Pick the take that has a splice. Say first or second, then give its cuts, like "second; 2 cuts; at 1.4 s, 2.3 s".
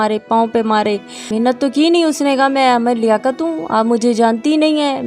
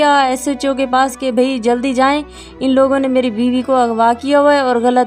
first; 1 cut; at 1.2 s